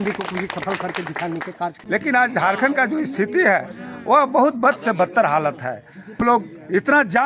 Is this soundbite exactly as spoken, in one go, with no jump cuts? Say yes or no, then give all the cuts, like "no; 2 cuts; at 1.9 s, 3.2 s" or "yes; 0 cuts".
no; 2 cuts; at 2.1 s, 6.2 s